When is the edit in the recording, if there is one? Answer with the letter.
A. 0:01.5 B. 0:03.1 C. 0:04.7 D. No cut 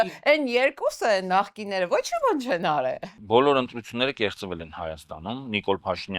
B